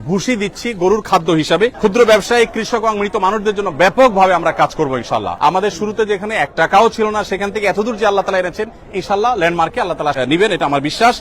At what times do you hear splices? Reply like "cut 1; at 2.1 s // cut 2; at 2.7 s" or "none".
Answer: cut 1; at 1.8 s // cut 2; at 5.3 s // cut 3; at 10.2 s